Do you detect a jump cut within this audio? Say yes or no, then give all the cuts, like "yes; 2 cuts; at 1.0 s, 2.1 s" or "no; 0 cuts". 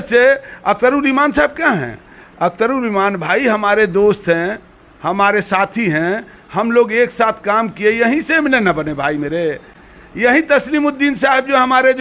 no; 0 cuts